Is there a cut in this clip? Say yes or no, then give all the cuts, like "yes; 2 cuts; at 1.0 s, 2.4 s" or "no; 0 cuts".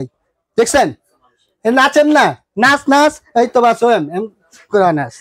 no; 0 cuts